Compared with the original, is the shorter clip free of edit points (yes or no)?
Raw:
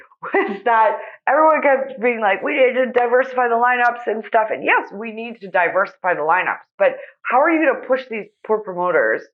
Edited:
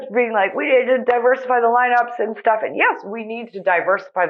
yes